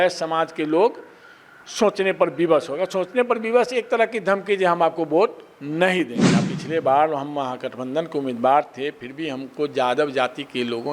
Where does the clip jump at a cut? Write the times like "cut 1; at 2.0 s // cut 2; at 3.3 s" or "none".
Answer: cut 1; at 6.5 s